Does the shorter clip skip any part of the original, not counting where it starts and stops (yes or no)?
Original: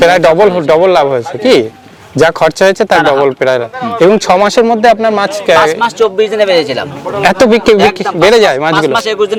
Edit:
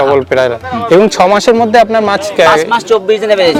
no